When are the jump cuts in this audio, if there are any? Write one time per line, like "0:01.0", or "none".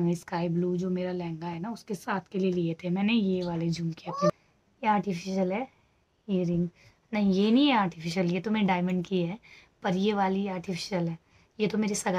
0:04.3